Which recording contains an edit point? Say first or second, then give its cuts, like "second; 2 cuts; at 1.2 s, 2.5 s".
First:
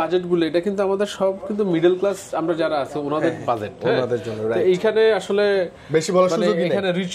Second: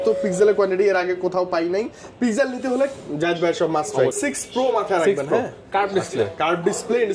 second; 1 cut; at 4.1 s